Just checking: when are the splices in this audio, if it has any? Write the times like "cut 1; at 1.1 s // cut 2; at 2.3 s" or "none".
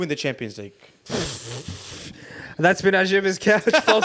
none

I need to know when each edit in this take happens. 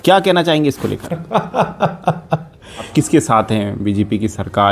cut 1; at 2.9 s

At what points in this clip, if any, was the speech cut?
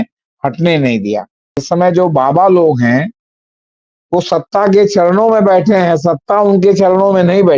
cut 1; at 1.6 s

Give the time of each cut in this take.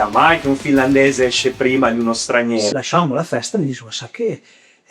cut 1; at 2.7 s

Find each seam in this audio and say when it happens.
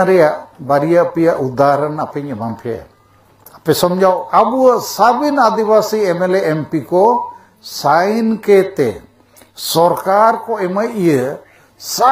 cut 1; at 4.2 s

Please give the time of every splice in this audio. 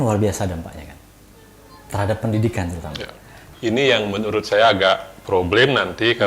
cut 1; at 3.4 s

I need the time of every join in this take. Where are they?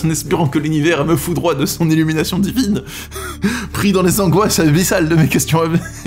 none

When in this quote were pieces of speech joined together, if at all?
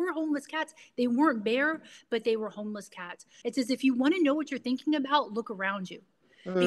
cut 1; at 3.3 s

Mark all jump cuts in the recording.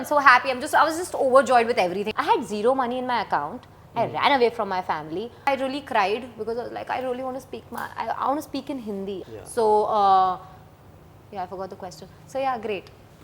cut 1; at 2.0 s // cut 2; at 5.5 s // cut 3; at 9.2 s

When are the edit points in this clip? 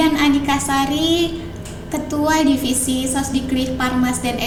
none

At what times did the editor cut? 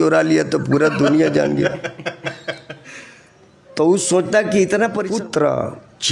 cut 1; at 5.1 s

